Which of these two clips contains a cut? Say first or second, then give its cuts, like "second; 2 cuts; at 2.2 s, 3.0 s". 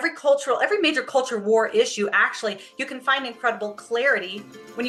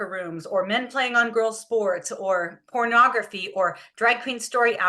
second; 1 cut; at 2.6 s